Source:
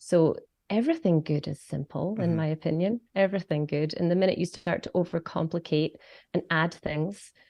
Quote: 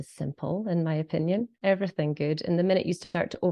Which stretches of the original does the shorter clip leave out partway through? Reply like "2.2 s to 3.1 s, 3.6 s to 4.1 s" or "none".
none